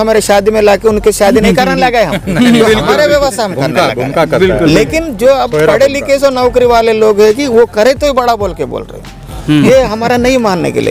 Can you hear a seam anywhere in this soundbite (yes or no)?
no